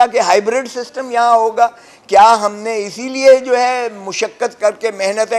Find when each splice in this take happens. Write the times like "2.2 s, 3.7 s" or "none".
none